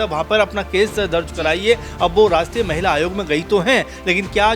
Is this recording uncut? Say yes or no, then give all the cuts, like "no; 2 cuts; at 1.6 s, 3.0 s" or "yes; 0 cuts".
yes; 0 cuts